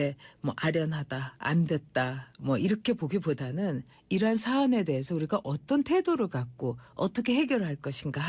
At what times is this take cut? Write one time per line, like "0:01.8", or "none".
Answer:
0:01.0